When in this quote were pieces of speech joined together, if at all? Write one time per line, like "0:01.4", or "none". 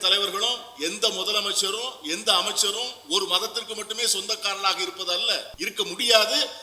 0:05.5